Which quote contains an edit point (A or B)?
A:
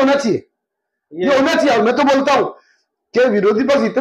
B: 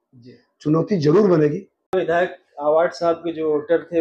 B